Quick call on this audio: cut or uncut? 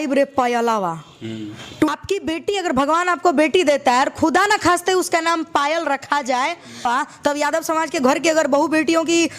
cut